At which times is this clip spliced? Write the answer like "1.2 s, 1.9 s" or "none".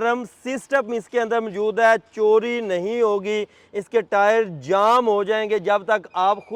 none